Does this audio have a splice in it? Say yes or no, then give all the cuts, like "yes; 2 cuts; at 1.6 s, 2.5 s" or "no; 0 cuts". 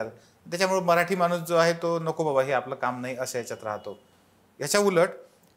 no; 0 cuts